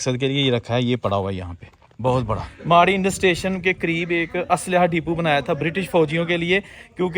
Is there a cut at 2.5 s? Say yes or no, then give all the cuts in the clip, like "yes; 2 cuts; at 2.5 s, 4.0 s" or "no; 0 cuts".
yes; 1 cut; at 2.5 s